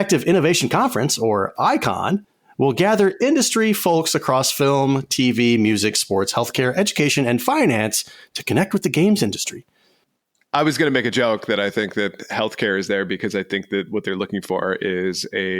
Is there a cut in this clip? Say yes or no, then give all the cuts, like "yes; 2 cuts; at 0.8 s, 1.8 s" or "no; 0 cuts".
yes; 2 cuts; at 2.4 s, 10.2 s